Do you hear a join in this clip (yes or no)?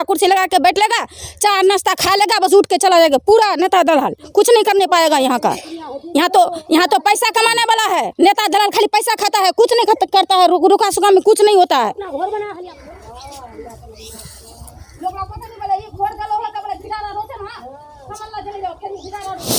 yes